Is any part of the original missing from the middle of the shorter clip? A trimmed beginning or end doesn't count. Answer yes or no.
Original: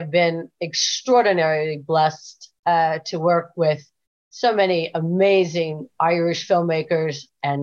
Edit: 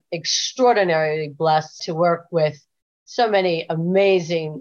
yes